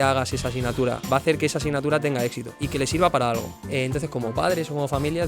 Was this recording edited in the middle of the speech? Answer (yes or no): yes